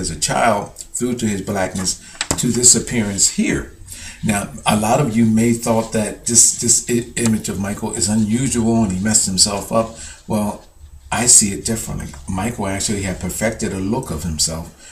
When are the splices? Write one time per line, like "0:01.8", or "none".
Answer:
none